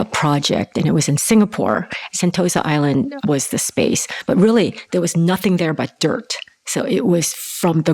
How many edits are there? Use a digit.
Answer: 2